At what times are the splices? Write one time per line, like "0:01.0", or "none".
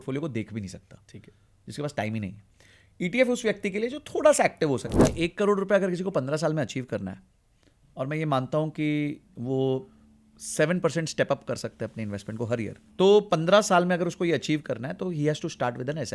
0:05.1
0:12.8